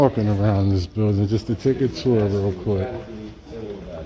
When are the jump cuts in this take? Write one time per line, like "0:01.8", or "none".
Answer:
none